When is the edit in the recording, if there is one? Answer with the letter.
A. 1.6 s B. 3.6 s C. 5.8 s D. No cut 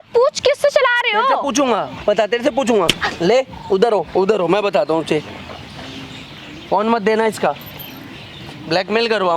D